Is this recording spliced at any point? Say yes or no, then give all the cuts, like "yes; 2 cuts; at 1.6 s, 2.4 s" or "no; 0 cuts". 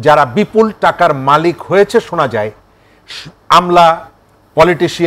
no; 0 cuts